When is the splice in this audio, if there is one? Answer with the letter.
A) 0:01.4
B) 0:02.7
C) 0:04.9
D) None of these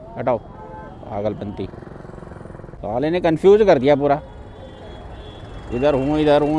D